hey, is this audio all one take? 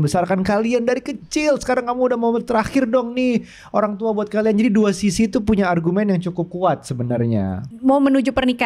no; 1 cut; at 7.7 s

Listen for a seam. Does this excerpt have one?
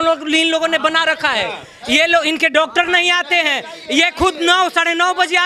no; 0 cuts

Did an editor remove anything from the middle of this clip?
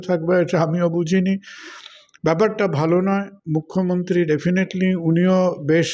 no; 0 cuts

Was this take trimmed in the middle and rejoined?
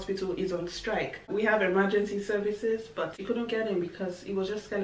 yes; 2 cuts; at 1.3 s, 3.2 s

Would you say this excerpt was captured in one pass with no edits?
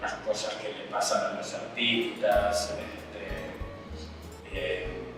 yes; 0 cuts

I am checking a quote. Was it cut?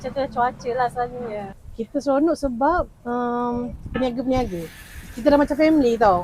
yes; 1 cut; at 1.4 s

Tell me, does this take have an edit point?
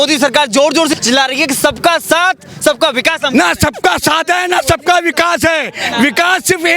yes; 1 cut; at 1.0 s

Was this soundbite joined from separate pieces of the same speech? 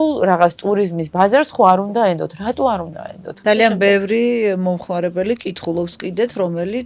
yes; 1 cut; at 3.4 s

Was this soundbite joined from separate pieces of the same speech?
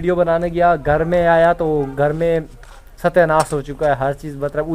no; 0 cuts

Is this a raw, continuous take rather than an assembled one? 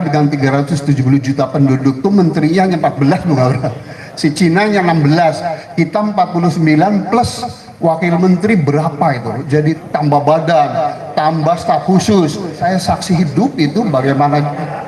no; 2 cuts; at 9.8 s, 12.6 s

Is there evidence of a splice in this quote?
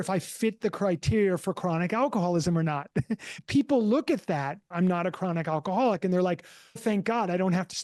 yes; 3 cuts; at 3.3 s, 4.7 s, 6.8 s

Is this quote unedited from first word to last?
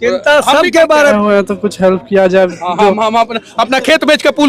no; 1 cut; at 1.1 s

